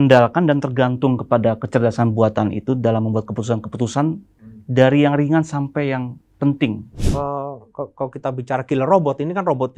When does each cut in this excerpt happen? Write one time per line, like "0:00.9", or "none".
0:07.0